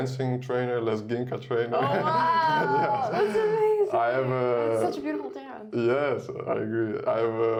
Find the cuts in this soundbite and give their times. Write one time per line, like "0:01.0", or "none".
none